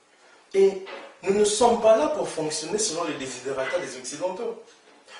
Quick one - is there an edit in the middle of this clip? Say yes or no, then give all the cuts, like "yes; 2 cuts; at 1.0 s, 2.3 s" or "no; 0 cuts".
no; 0 cuts